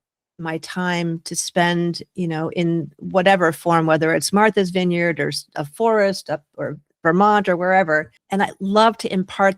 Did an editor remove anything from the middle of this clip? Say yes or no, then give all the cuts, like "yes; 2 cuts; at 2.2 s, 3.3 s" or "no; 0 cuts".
yes; 1 cut; at 8.2 s